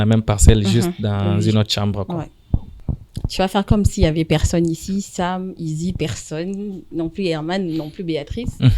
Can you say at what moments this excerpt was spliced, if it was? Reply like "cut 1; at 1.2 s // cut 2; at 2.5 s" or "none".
cut 1; at 2.7 s